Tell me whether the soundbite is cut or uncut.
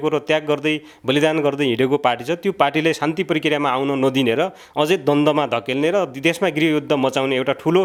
uncut